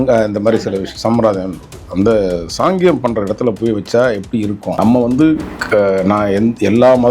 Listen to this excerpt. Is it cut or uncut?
cut